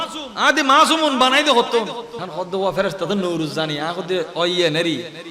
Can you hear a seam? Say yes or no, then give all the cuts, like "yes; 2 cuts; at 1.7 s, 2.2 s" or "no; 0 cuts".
yes; 1 cut; at 2.1 s